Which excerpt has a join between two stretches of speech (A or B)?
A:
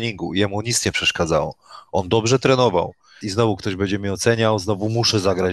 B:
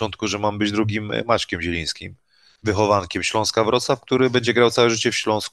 A